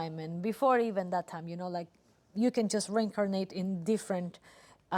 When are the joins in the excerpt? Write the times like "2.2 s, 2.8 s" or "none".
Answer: none